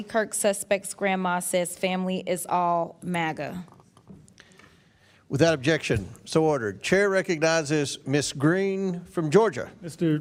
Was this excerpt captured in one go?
yes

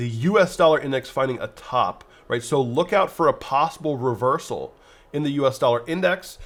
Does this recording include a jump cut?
no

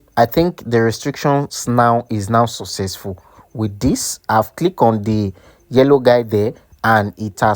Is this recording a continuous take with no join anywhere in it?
yes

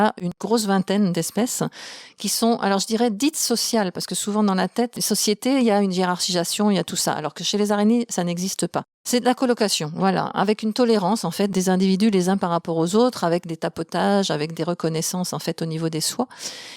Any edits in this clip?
yes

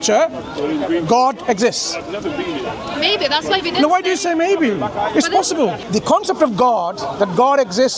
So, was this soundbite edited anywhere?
yes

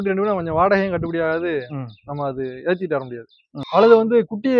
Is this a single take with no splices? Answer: no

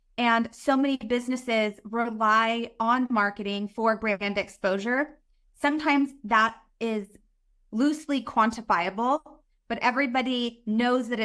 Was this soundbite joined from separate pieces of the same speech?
yes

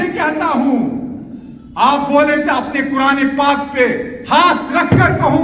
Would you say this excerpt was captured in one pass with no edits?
yes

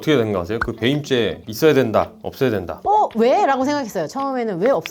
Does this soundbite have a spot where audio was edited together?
no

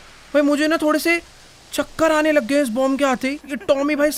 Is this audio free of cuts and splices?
yes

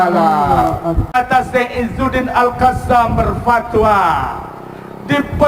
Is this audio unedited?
no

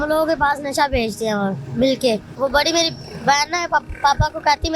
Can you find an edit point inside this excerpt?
yes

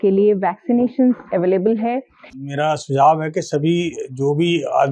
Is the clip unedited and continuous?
no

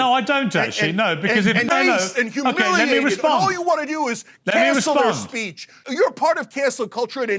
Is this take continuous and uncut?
no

